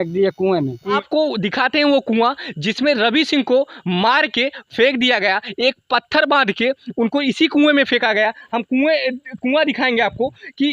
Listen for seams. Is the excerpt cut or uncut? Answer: cut